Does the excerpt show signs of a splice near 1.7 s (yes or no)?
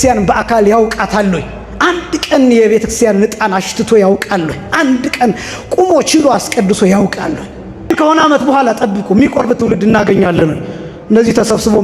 no